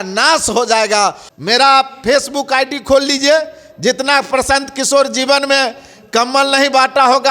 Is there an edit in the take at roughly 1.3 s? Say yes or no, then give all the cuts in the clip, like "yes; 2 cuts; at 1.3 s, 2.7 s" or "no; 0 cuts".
yes; 1 cut; at 1.3 s